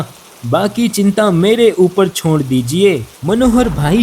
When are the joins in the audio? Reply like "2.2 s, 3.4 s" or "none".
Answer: 3.1 s